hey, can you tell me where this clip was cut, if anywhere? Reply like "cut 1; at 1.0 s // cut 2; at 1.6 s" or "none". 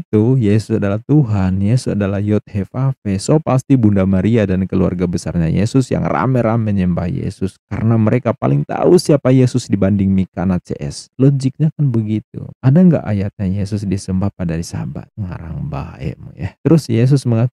none